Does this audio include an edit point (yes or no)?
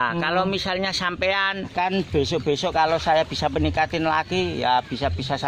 yes